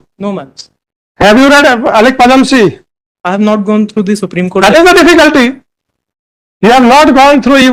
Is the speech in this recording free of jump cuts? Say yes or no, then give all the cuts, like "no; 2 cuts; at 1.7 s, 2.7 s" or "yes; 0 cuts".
yes; 0 cuts